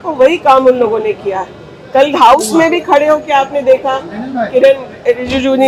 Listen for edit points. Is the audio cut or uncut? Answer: uncut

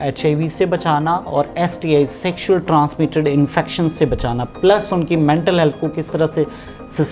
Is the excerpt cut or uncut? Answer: uncut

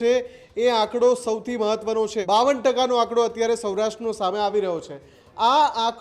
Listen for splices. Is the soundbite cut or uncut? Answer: cut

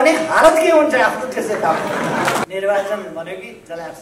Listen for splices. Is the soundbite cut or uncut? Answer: cut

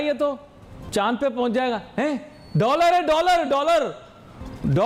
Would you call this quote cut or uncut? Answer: uncut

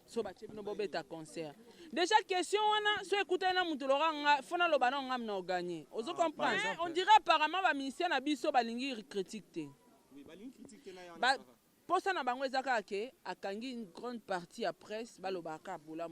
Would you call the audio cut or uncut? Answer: cut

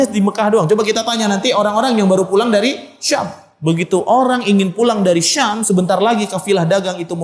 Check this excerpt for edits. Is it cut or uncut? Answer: uncut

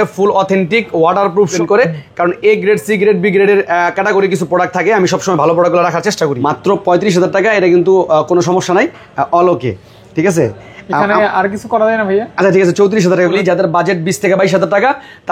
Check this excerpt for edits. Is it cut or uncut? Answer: cut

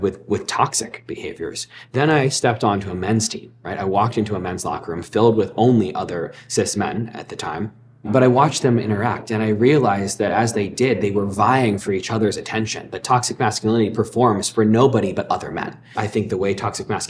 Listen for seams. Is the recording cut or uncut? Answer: cut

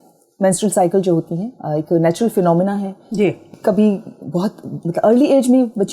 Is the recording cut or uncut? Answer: cut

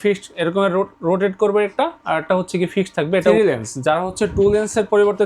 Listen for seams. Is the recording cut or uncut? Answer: cut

